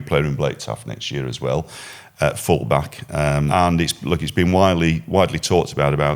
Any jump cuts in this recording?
yes; 1 cut; at 3.5 s

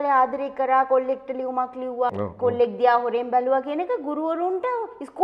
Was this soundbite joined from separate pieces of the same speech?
yes; 1 cut; at 2.1 s

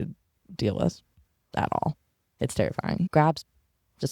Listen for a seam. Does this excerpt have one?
yes; 1 cut; at 3.1 s

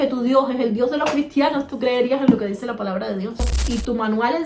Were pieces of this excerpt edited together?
yes; 1 cut; at 3.5 s

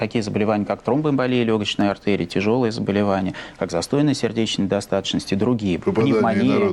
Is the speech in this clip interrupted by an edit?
yes; 1 cut; at 2.0 s

